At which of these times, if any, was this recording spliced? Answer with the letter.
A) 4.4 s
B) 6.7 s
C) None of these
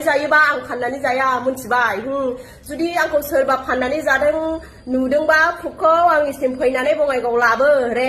C